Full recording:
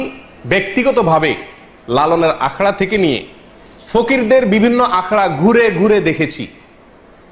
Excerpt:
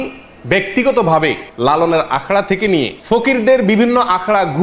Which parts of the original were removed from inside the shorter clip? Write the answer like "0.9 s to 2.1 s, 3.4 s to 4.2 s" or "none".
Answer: 1.5 s to 1.8 s, 3.3 s to 3.8 s